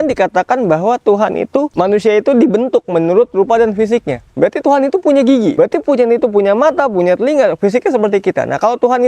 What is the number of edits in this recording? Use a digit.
2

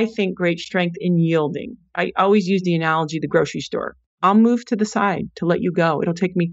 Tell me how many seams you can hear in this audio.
1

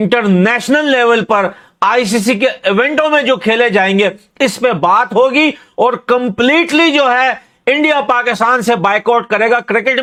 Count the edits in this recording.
0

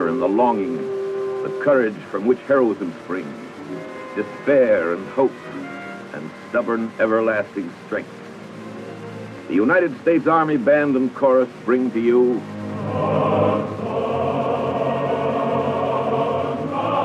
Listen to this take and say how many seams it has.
1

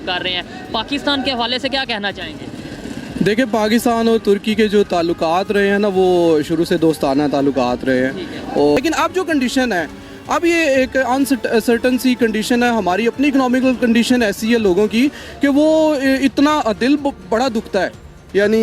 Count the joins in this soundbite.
1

